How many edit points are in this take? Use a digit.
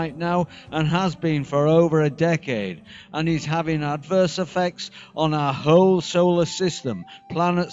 1